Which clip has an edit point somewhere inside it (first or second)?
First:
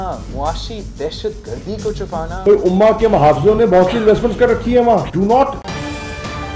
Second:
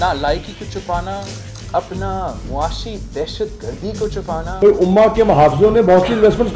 first